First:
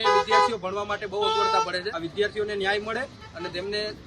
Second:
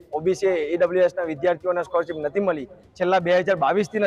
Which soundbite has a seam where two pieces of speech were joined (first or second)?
first